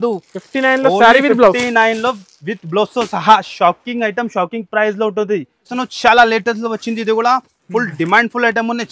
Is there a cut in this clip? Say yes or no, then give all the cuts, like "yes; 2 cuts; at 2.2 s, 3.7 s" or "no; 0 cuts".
no; 0 cuts